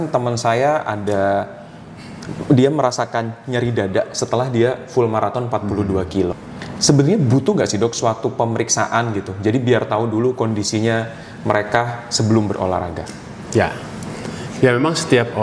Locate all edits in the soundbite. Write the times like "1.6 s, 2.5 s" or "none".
6.4 s

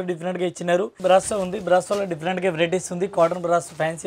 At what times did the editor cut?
1.0 s

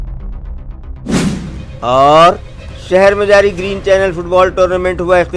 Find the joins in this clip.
none

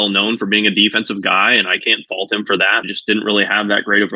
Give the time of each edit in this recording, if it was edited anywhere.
2.8 s

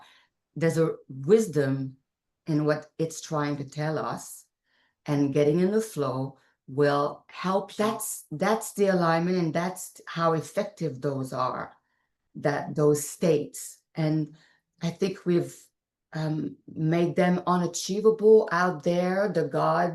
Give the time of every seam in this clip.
7.7 s

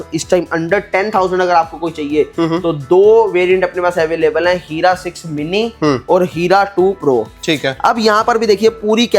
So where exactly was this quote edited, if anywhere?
none

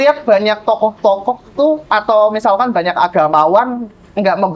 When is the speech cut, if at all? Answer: none

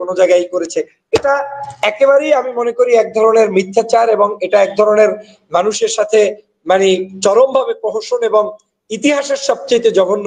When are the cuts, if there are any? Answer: none

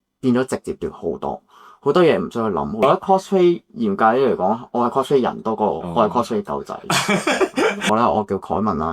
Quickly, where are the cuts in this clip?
2.8 s, 7.9 s

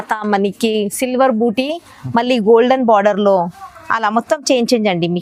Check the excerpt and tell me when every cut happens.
none

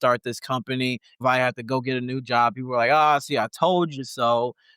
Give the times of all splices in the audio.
1.2 s

